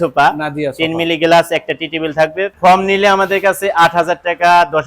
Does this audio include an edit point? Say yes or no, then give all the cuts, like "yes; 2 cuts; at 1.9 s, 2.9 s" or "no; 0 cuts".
yes; 1 cut; at 2.5 s